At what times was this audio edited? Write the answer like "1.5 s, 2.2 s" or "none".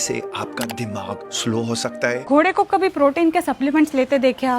2.2 s

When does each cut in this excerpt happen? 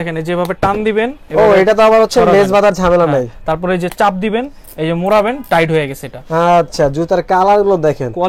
none

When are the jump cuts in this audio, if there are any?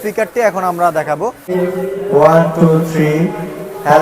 1.5 s

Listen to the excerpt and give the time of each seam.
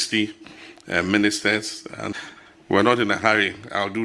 2.2 s

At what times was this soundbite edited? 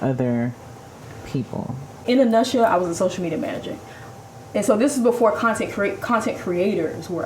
2.0 s

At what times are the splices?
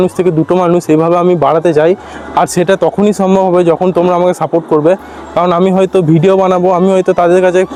none

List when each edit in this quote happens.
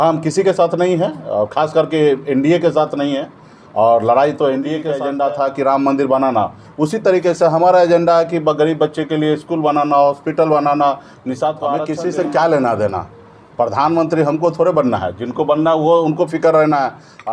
5.0 s, 11.8 s

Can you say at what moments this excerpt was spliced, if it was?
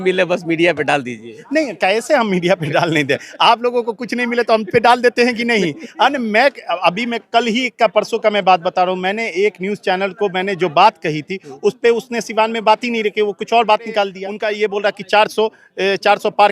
14.2 s

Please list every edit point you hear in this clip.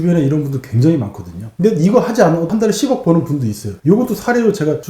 none

